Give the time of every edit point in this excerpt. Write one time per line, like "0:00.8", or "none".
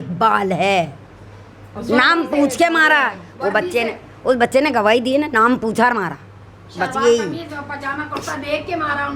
none